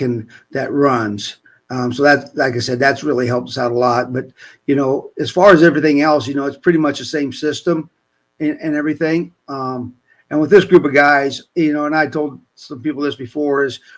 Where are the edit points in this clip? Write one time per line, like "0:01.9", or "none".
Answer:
none